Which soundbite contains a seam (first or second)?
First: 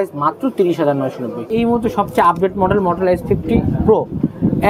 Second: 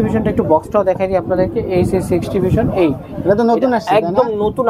first